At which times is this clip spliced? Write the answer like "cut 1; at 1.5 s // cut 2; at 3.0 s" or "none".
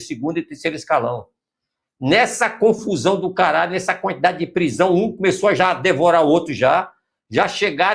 none